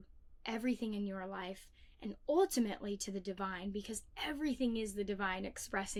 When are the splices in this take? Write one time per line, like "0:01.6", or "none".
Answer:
none